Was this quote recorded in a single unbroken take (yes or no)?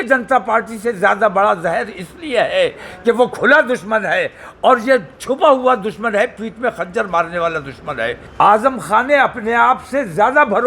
no